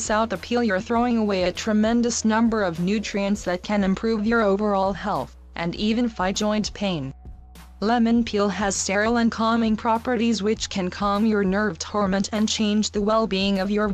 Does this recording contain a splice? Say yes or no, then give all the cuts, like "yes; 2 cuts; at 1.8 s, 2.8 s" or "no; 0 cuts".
no; 0 cuts